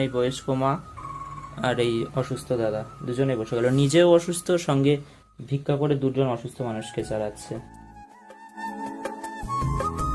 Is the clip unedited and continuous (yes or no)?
yes